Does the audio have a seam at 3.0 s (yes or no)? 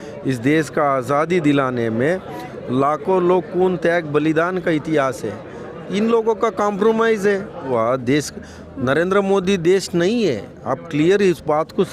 no